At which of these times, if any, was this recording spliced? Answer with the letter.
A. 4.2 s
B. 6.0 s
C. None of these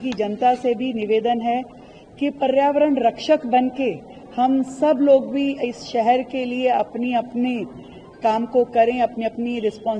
C